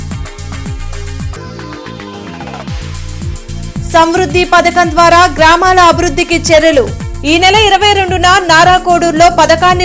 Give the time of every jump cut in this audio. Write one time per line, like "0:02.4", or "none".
0:01.3